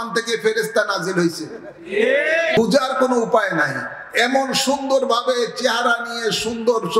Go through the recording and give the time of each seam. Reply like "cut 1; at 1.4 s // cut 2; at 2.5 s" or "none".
cut 1; at 2.6 s